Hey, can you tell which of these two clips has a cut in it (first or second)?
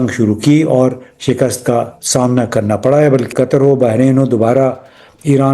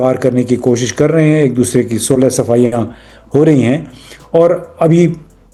first